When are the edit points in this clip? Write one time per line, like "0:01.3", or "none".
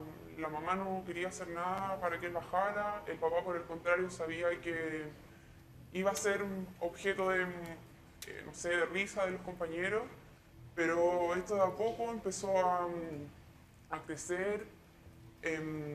0:03.8